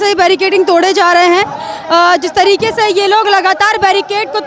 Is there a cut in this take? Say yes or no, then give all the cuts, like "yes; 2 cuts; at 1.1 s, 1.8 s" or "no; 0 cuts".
no; 0 cuts